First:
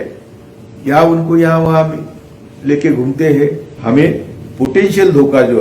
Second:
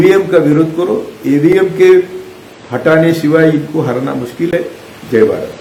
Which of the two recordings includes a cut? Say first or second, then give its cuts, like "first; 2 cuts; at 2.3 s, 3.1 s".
first; 1 cut; at 3.7 s